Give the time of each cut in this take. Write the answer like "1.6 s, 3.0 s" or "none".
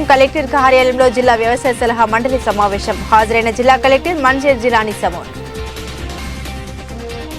none